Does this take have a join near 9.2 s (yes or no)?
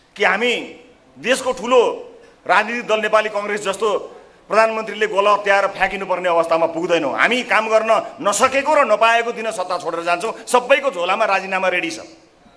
no